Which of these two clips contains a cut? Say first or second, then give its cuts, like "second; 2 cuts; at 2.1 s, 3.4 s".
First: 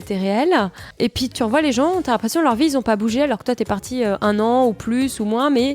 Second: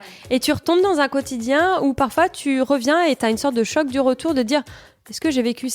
first; 1 cut; at 1.3 s